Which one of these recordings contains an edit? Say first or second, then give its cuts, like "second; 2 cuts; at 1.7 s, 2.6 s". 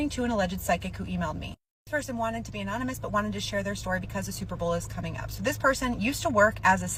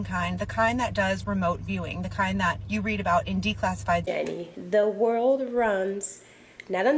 second; 1 cut; at 4.1 s